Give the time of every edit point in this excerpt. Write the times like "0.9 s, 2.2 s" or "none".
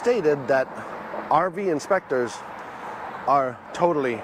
none